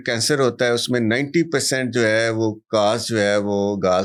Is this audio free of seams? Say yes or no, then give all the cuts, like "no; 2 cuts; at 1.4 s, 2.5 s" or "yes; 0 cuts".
yes; 0 cuts